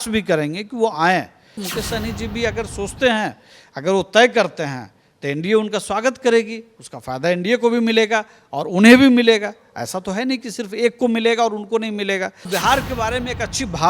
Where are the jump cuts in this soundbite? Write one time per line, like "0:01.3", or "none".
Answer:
0:01.7
0:12.5